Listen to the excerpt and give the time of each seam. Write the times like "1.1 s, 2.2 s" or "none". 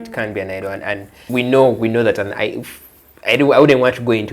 1.1 s